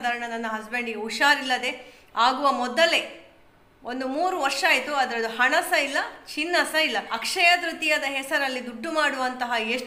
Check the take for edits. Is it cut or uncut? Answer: cut